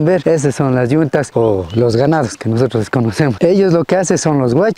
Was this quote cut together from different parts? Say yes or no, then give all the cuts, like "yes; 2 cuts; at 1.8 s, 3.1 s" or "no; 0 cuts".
no; 0 cuts